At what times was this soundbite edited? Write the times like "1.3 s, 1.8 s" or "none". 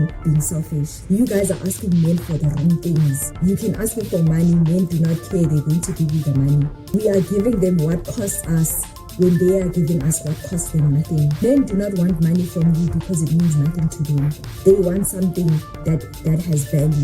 0.9 s, 3.3 s, 6.9 s, 11.4 s